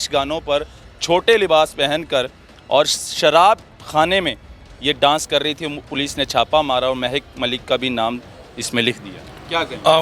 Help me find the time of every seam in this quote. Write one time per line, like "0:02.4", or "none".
none